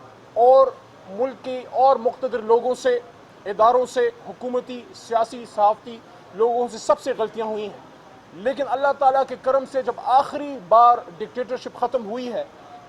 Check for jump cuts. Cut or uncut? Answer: uncut